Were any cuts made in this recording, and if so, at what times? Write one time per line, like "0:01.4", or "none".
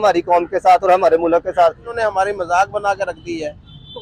0:01.9